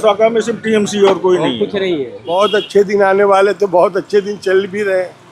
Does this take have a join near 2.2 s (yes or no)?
yes